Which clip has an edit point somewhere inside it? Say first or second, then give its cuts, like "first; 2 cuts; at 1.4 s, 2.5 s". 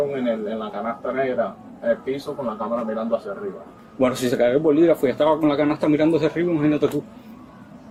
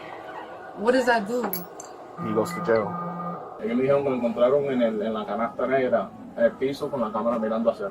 second; 1 cut; at 3.5 s